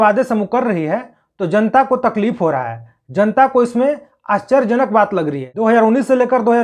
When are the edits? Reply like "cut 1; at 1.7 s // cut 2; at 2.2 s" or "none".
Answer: cut 1; at 5.5 s

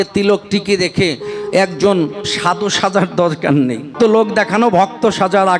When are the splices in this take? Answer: cut 1; at 3.9 s

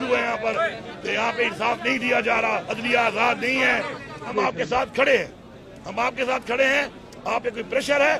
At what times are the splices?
cut 1; at 2.7 s // cut 2; at 4.3 s

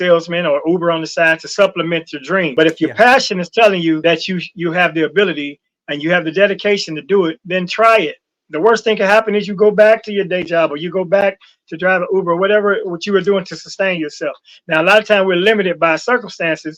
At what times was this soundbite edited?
cut 1; at 2.5 s // cut 2; at 4.0 s

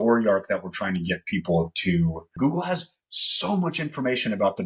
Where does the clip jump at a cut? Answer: cut 1; at 2.3 s

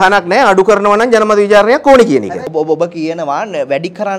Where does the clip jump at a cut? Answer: none

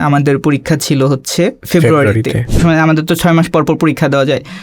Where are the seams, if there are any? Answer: cut 1; at 1.6 s // cut 2; at 2.6 s

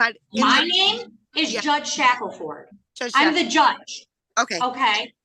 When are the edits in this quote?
none

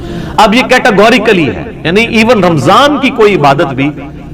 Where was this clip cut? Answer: none

